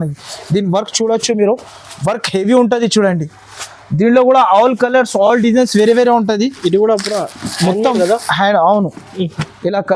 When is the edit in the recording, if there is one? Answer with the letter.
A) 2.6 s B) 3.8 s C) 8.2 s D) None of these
D